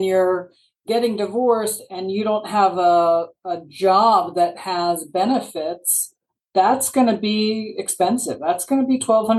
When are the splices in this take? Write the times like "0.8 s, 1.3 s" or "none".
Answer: none